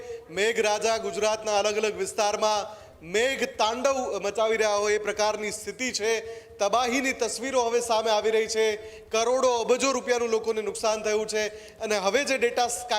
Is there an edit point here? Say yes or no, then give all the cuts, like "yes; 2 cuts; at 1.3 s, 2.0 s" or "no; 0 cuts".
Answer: no; 0 cuts